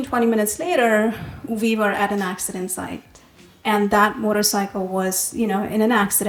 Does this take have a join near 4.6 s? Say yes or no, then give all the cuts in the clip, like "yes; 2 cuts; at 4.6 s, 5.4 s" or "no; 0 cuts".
no; 0 cuts